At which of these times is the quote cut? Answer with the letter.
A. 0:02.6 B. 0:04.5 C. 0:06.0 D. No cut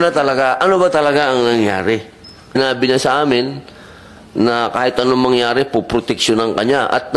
A